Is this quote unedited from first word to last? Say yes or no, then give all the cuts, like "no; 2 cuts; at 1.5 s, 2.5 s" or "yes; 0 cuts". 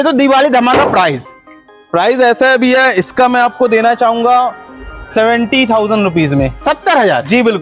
yes; 0 cuts